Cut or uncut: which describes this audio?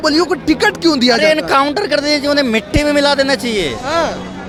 uncut